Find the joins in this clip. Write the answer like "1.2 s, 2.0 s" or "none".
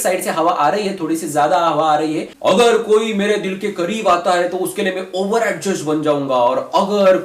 2.3 s